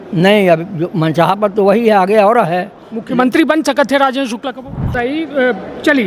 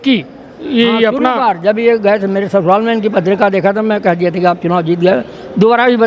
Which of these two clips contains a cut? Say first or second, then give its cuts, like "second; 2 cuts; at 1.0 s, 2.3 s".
first; 1 cut; at 4.9 s